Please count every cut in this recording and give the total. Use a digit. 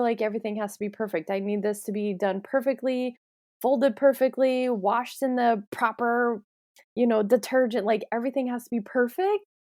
0